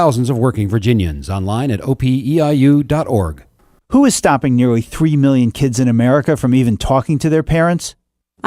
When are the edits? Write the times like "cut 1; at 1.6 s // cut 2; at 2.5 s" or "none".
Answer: cut 1; at 3.4 s